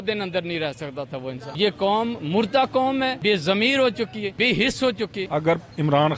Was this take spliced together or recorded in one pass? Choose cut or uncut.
cut